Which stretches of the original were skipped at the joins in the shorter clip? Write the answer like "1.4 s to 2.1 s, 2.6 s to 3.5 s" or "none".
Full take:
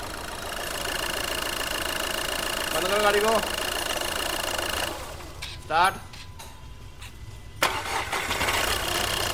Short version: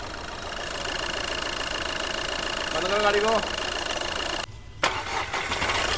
4.4 s to 7.2 s